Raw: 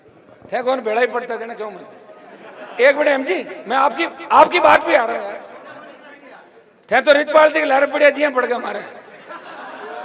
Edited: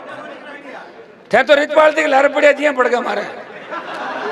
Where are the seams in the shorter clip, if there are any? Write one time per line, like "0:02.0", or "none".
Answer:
none